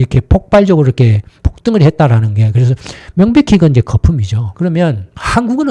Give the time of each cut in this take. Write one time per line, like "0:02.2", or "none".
0:04.4